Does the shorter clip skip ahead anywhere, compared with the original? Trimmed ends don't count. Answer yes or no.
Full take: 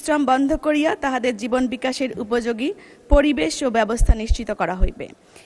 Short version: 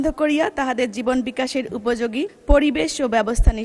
yes